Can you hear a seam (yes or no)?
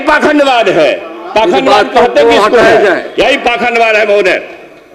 no